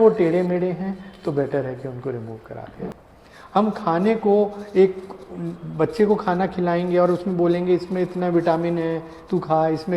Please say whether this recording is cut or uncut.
cut